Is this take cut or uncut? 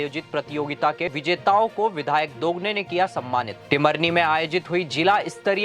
cut